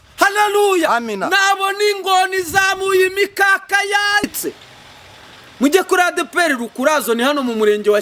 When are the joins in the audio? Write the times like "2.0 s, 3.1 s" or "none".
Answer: 4.2 s